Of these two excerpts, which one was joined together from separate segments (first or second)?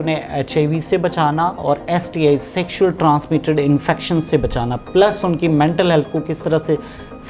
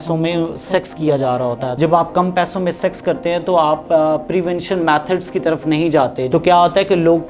second